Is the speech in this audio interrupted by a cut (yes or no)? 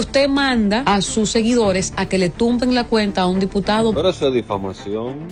no